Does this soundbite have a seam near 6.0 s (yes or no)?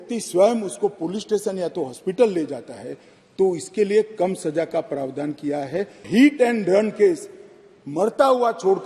yes